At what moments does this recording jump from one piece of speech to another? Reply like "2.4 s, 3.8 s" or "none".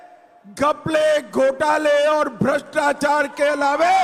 none